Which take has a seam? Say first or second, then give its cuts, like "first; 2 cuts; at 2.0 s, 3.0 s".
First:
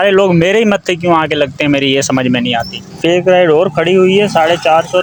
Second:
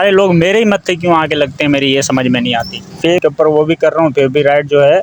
second; 1 cut; at 3.2 s